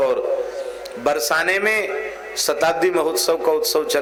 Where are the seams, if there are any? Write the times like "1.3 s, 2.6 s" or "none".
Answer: none